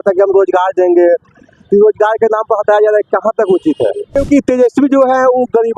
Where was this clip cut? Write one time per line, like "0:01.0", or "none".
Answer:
0:04.2